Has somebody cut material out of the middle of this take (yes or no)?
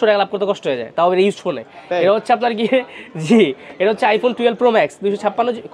no